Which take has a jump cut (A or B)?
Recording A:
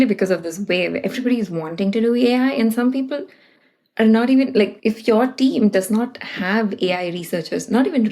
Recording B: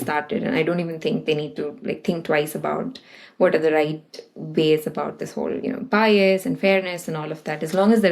A